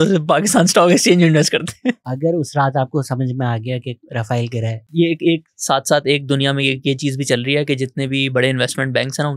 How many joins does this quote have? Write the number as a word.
two